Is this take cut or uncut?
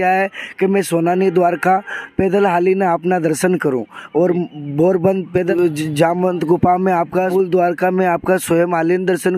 cut